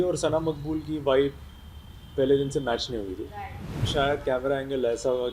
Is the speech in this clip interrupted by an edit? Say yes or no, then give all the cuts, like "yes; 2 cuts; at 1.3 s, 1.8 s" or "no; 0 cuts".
yes; 1 cut; at 3.9 s